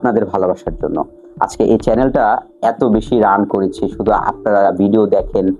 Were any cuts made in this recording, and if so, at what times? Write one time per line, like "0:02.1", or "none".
none